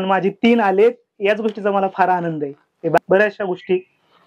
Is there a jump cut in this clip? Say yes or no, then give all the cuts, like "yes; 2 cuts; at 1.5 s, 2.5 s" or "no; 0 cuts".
yes; 1 cut; at 3.0 s